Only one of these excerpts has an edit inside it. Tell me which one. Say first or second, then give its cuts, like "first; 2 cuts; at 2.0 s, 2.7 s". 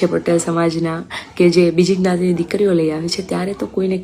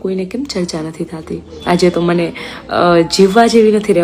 second; 1 cut; at 1.5 s